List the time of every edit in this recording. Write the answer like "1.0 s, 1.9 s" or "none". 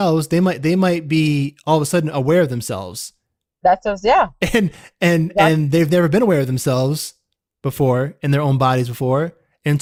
none